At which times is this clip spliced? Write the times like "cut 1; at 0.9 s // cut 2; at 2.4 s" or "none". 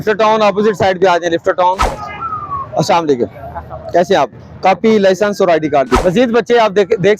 cut 1; at 1.9 s // cut 2; at 6.0 s